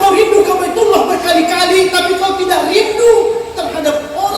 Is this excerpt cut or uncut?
uncut